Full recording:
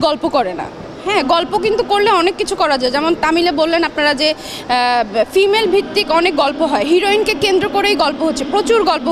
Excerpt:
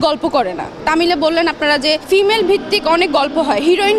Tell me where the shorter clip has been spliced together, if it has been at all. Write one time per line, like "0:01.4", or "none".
0:00.8
0:02.1